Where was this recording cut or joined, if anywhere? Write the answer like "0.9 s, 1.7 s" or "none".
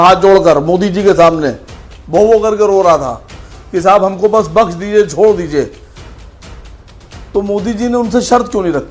none